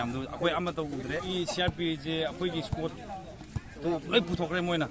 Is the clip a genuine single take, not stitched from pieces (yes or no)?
no